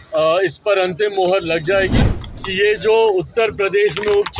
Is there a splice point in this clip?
yes; 1 cut; at 2.0 s

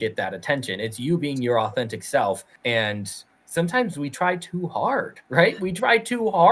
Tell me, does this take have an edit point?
yes; 2 cuts; at 2.5 s, 5.2 s

